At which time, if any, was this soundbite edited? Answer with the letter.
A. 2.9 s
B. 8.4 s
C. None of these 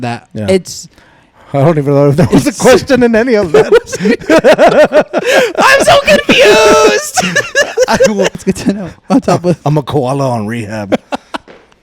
B